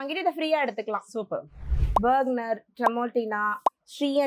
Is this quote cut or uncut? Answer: cut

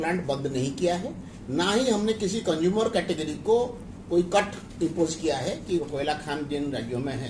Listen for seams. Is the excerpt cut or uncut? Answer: cut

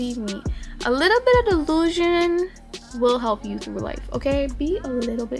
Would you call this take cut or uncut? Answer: uncut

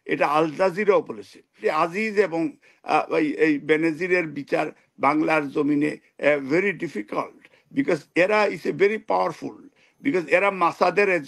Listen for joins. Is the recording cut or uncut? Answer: cut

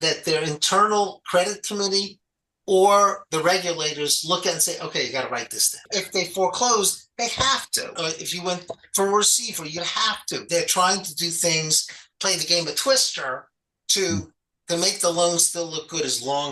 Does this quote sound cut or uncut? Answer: cut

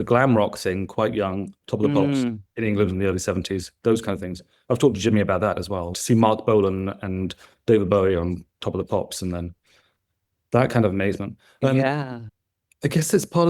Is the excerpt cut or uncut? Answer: uncut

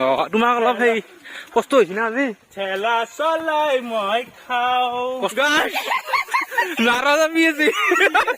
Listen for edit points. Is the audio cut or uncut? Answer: cut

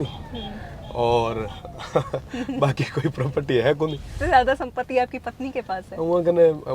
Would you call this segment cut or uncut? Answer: cut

